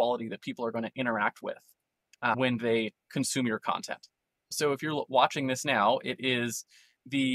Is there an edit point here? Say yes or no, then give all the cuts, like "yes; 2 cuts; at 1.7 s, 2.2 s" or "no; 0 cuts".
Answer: no; 0 cuts